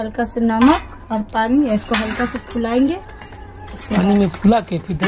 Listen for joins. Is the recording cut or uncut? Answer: uncut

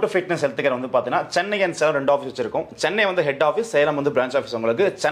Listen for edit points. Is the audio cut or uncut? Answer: uncut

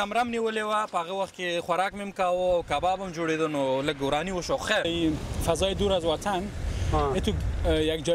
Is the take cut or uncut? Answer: cut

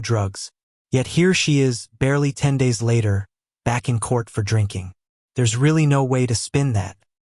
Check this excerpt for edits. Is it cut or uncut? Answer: uncut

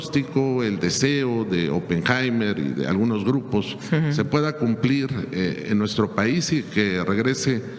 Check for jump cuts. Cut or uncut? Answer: uncut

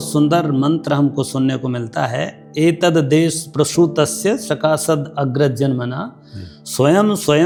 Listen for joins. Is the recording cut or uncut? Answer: uncut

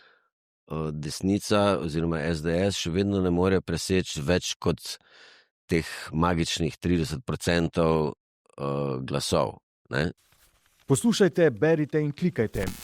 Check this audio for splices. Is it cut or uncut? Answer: cut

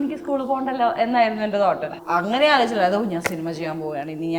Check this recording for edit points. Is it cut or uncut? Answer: cut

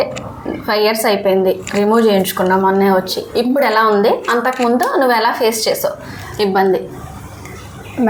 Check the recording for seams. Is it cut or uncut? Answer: uncut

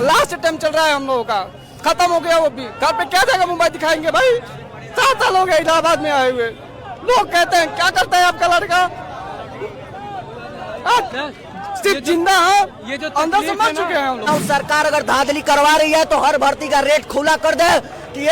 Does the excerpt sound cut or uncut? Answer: cut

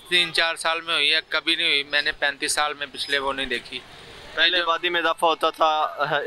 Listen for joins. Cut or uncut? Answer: uncut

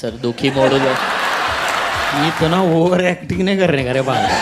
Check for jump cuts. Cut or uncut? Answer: cut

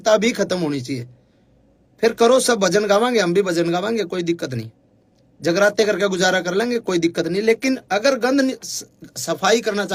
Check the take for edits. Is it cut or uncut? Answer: uncut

